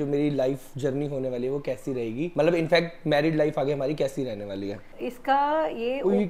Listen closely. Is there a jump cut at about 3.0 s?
no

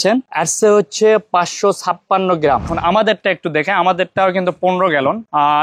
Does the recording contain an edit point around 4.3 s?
no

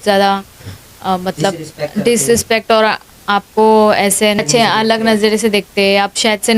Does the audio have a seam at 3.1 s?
no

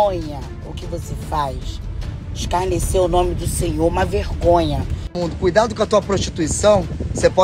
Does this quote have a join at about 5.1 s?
yes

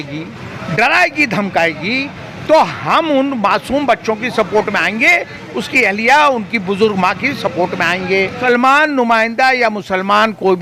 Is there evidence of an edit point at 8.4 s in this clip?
yes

